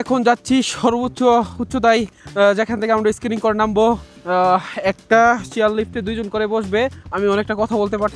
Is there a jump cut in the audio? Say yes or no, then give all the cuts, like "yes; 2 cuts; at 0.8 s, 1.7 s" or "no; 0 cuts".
yes; 3 cuts; at 2.2 s, 4.1 s, 7.0 s